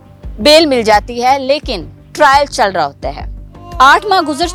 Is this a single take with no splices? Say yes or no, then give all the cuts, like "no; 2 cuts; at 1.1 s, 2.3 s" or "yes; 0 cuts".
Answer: yes; 0 cuts